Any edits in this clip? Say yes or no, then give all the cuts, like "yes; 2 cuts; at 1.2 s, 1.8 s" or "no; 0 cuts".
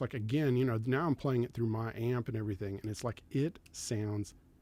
no; 0 cuts